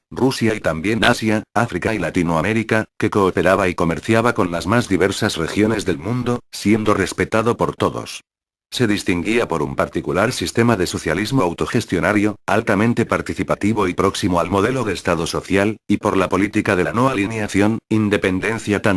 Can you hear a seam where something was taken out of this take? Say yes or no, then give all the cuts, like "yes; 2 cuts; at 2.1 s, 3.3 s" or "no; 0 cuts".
no; 0 cuts